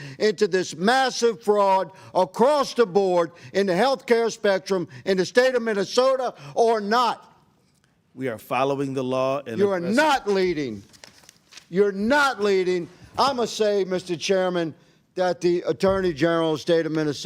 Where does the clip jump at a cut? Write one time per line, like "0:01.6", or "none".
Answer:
none